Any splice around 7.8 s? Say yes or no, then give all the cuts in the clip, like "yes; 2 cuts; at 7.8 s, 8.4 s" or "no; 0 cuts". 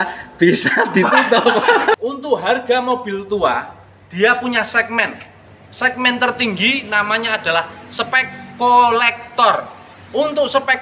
no; 1 cut; at 2.0 s